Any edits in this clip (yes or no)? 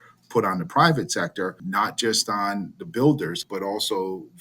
yes